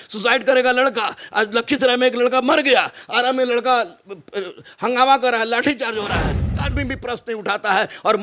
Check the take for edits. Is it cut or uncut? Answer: cut